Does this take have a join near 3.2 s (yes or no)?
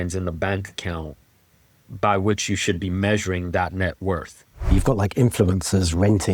no